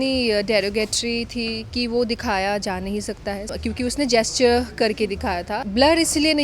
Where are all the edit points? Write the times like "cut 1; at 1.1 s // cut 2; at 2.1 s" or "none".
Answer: cut 1; at 3.5 s // cut 2; at 5.6 s